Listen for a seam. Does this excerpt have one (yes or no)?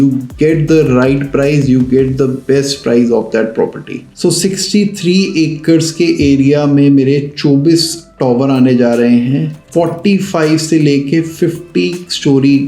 yes